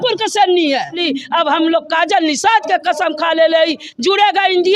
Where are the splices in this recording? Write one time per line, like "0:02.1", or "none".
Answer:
0:01.0
0:03.9